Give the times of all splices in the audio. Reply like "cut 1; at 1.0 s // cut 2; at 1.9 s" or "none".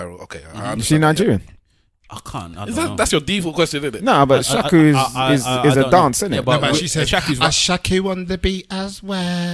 none